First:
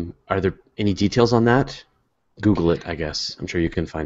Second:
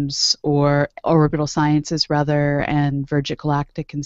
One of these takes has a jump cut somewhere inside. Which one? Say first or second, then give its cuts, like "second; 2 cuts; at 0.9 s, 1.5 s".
second; 1 cut; at 1.0 s